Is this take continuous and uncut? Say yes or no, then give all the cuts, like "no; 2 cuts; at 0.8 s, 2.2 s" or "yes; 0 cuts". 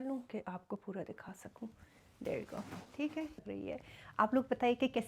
no; 1 cut; at 3.4 s